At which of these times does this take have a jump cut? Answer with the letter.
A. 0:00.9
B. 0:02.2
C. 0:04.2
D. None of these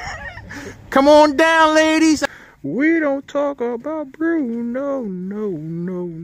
B